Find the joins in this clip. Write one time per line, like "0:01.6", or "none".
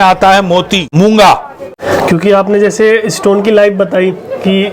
0:00.9
0:01.7